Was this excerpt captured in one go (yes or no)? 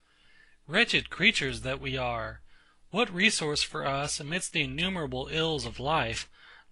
yes